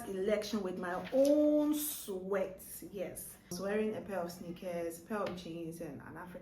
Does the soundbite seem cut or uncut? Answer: cut